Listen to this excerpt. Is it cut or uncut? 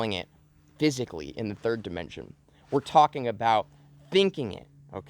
uncut